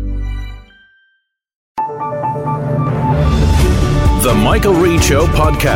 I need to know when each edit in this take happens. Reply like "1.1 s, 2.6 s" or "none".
1.7 s